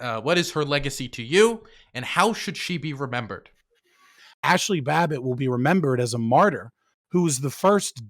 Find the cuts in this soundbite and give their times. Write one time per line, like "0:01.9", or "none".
0:04.2